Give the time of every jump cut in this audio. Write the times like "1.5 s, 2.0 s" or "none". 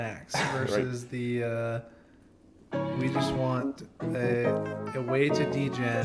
none

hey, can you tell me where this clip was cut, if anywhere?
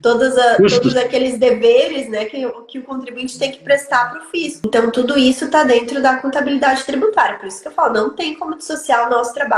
4.6 s

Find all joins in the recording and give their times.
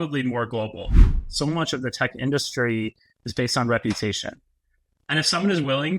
1.0 s

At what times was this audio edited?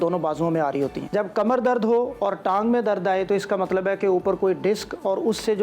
1.0 s

